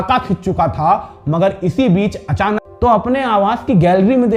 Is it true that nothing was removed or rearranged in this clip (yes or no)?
no